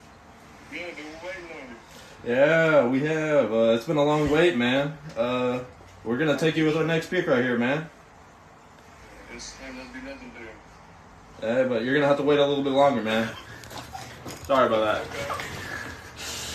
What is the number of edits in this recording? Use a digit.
0